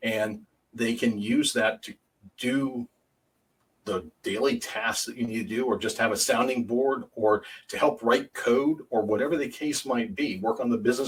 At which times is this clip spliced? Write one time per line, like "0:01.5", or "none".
none

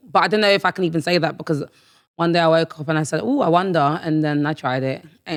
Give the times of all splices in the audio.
none

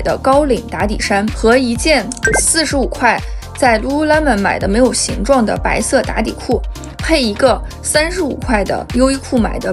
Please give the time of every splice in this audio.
none

